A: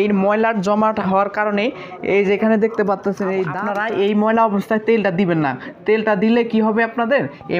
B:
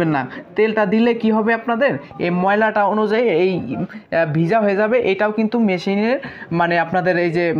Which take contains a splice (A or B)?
A